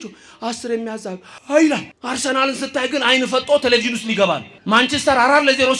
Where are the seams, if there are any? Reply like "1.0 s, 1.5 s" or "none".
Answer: 1.3 s, 1.9 s, 4.5 s